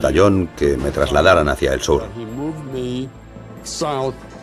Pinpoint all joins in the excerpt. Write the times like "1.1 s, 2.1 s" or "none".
3.5 s

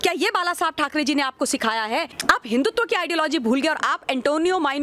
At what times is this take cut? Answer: 2.1 s

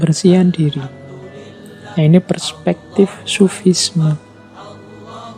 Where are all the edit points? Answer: 4.3 s

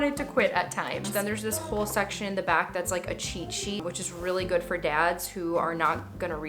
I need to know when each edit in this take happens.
1.1 s, 3.8 s

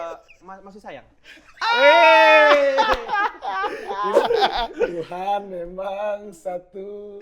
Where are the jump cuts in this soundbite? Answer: 4.2 s

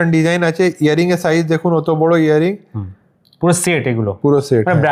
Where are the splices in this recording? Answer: none

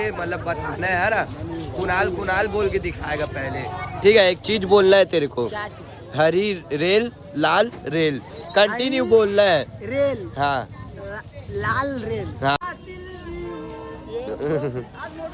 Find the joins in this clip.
12.6 s

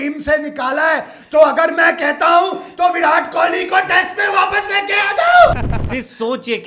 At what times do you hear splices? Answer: 5.7 s

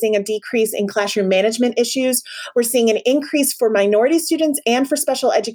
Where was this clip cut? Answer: none

